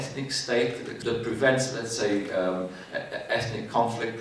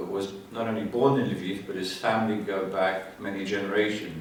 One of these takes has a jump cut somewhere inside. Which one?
first; 1 cut; at 1.0 s

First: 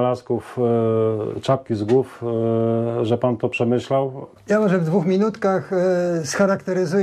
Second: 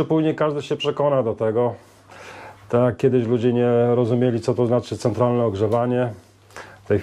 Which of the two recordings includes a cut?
first; 1 cut; at 4.3 s

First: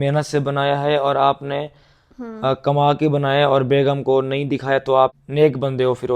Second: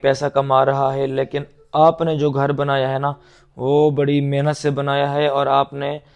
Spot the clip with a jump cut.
first; 1 cut; at 5.2 s

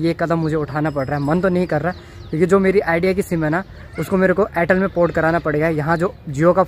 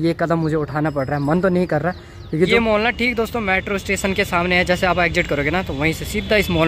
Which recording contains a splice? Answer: second; 1 cut; at 2.5 s

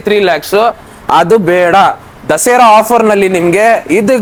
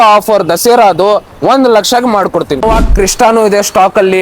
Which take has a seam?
second; 1 cut; at 2.6 s

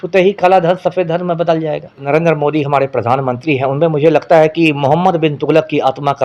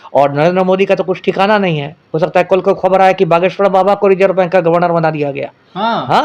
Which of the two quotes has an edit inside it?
first; 1 cut; at 2.1 s

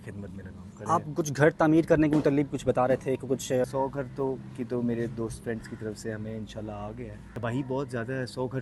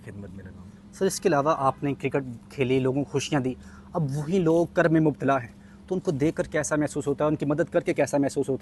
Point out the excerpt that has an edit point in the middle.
first; 3 cuts; at 0.8 s, 3.7 s, 7.2 s

